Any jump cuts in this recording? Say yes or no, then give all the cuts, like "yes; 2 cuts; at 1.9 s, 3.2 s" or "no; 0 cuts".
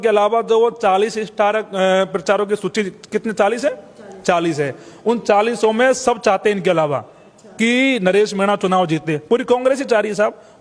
no; 0 cuts